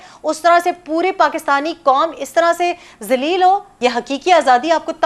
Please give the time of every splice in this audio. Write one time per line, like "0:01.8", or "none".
0:03.7